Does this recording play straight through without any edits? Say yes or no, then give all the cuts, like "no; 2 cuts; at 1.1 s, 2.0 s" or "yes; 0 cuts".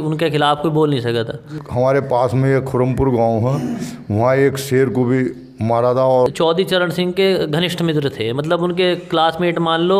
no; 2 cuts; at 1.6 s, 6.3 s